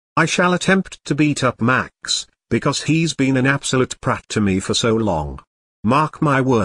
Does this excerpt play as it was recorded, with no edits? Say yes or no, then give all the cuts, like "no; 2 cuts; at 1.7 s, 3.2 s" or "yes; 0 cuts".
yes; 0 cuts